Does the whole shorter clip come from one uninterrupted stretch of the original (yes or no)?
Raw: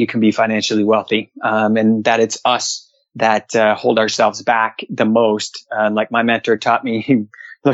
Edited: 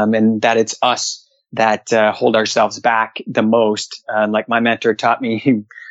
yes